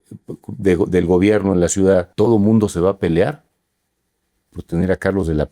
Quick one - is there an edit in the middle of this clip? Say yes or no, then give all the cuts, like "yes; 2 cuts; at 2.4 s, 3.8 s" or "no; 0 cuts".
yes; 1 cut; at 2.1 s